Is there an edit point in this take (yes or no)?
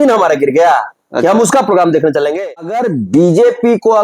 yes